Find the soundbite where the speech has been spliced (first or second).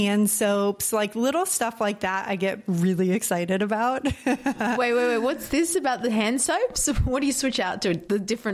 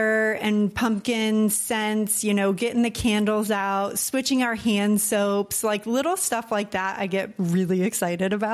first